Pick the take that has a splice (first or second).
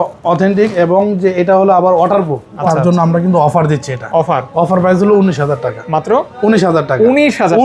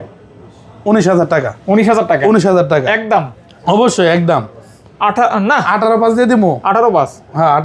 first